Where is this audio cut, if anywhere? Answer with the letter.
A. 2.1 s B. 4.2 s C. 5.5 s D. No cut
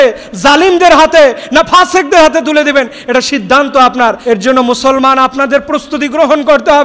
B